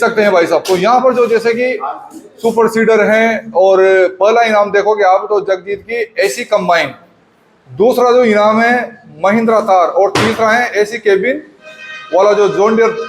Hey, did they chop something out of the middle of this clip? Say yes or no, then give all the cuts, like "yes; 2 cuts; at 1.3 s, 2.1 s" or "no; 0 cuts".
no; 0 cuts